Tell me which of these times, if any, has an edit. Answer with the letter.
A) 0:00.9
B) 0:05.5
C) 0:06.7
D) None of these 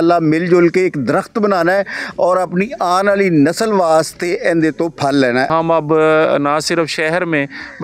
B